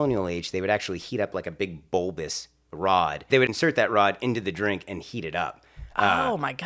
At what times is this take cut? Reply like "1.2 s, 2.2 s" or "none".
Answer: 3.5 s